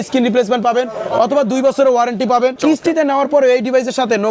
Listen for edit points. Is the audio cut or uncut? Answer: cut